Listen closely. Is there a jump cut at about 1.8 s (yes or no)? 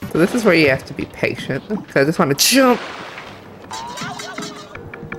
yes